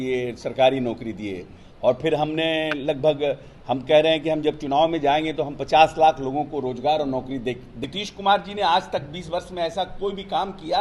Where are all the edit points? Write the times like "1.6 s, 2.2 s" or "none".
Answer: 7.7 s